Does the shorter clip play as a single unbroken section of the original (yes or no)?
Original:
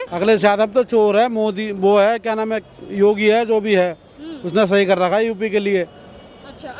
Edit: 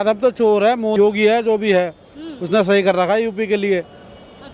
no